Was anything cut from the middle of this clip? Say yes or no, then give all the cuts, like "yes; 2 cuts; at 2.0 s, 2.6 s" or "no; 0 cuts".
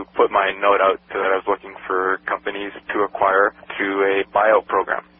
no; 0 cuts